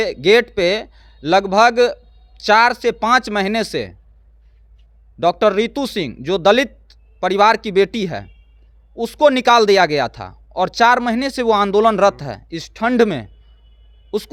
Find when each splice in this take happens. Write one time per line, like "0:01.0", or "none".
none